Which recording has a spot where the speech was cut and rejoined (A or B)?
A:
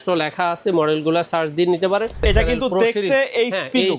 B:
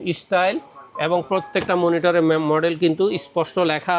A